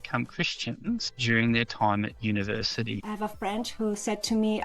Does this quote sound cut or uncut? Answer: cut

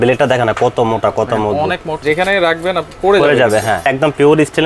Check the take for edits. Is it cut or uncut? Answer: cut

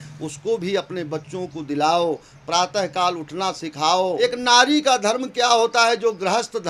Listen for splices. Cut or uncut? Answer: cut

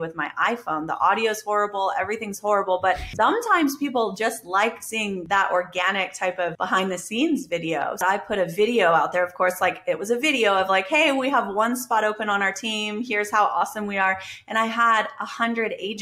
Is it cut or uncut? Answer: cut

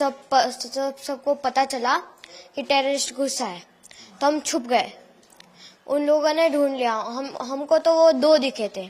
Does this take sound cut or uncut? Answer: uncut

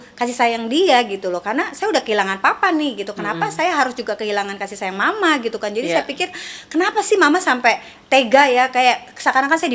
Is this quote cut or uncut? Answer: uncut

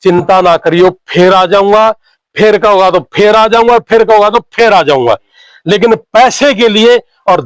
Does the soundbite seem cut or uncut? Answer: uncut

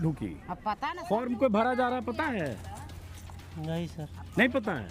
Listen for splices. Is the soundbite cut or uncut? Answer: cut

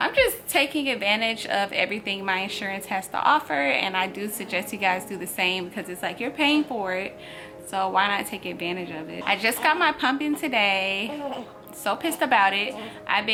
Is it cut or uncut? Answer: uncut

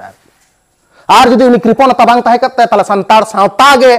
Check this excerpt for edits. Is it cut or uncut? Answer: uncut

